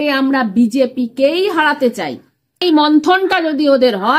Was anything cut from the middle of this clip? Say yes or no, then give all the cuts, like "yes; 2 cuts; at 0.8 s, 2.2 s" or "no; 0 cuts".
yes; 1 cut; at 2.6 s